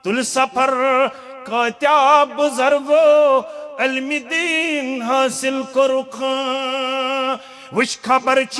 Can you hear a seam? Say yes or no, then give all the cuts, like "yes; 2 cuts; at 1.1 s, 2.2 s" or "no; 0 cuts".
no; 0 cuts